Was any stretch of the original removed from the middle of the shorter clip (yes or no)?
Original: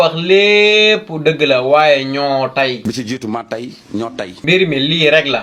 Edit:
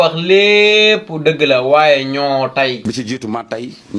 no